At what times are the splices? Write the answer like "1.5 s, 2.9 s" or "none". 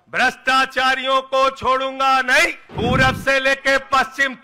2.6 s